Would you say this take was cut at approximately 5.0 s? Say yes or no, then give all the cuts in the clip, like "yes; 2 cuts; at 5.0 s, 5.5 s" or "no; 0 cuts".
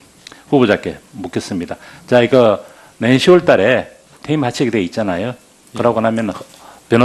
no; 1 cut; at 2.3 s